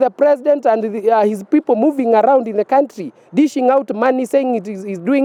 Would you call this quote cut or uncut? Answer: uncut